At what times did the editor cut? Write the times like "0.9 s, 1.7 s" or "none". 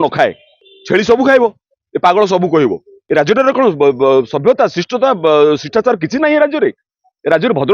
2.9 s